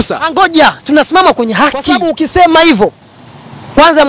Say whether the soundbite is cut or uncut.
cut